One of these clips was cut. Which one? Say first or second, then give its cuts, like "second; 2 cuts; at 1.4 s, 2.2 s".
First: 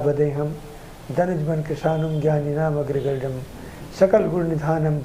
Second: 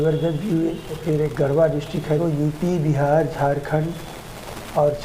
second; 1 cut; at 0.9 s